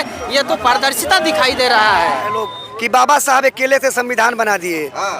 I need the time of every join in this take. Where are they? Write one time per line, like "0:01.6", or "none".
0:02.3